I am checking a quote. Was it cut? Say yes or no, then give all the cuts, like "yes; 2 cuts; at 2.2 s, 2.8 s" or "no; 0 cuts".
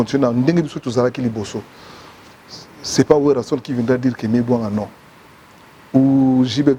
no; 0 cuts